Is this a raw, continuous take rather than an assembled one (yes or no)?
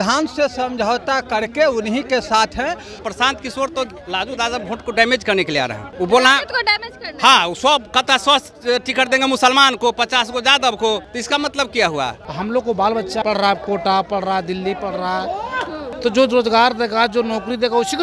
no